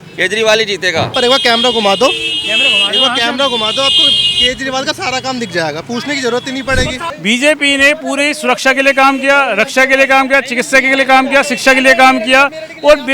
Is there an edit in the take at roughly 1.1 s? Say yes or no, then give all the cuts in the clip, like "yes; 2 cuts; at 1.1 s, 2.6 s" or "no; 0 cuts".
yes; 2 cuts; at 1.1 s, 7.1 s